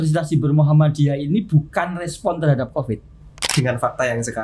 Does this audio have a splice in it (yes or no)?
yes